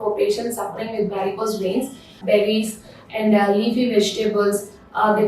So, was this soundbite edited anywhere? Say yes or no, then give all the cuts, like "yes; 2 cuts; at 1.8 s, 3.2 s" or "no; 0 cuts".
yes; 1 cut; at 2.2 s